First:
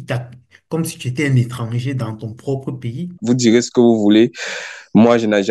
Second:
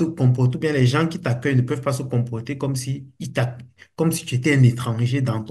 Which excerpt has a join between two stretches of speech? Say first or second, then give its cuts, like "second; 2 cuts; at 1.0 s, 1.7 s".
first; 1 cut; at 3.2 s